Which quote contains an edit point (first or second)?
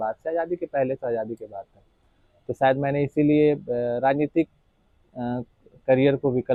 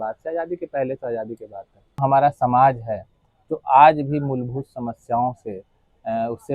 second